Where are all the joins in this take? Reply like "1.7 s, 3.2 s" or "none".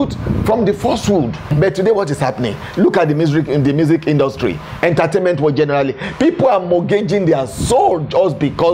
1.5 s